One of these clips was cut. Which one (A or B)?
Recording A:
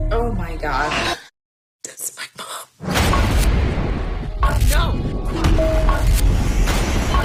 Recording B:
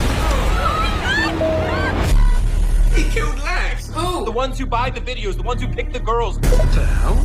B